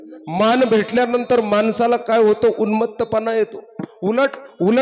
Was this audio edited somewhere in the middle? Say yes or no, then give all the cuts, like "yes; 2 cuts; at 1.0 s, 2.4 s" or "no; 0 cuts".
no; 0 cuts